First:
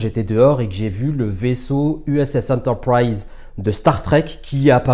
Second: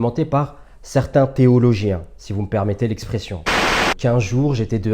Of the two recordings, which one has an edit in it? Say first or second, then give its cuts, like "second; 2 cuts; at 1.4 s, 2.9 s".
second; 1 cut; at 3.6 s